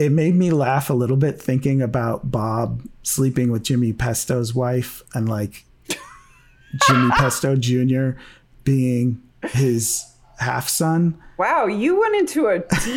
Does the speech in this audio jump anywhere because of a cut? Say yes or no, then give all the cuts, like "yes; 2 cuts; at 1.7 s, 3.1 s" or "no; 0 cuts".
no; 0 cuts